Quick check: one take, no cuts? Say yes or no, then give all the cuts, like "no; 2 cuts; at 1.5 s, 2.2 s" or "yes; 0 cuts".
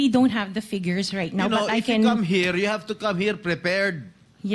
yes; 0 cuts